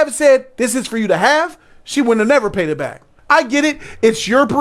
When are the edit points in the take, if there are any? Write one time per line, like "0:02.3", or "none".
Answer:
0:03.1